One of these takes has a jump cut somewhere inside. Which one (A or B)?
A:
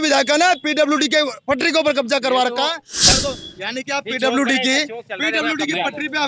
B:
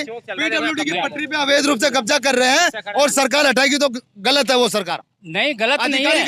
A